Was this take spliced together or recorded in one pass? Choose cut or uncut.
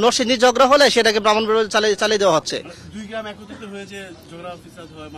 uncut